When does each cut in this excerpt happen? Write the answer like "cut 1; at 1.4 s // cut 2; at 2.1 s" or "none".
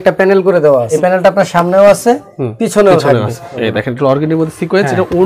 cut 1; at 0.9 s // cut 2; at 3.5 s